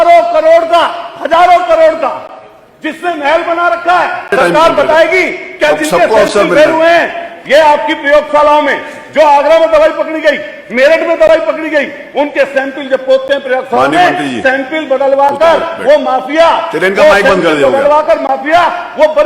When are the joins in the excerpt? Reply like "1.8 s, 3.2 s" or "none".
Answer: 4.3 s